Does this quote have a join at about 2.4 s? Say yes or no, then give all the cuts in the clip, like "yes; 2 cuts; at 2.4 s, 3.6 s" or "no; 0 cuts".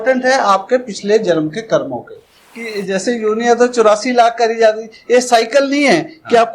yes; 1 cut; at 2.4 s